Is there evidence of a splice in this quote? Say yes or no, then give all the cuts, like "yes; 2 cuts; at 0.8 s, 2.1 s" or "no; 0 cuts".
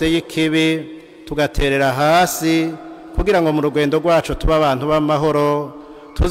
no; 0 cuts